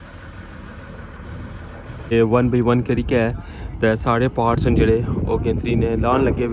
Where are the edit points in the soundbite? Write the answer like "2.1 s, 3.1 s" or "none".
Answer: 2.1 s